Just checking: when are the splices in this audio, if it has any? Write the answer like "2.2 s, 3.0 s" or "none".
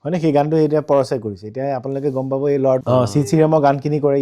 2.8 s